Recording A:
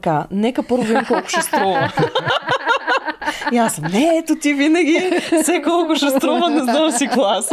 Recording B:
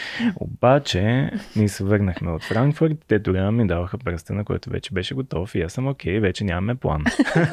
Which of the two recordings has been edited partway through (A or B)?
B